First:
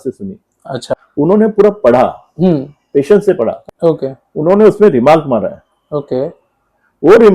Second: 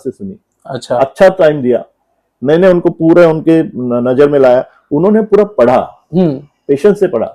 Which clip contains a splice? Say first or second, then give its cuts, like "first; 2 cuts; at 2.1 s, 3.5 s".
first; 2 cuts; at 0.9 s, 3.6 s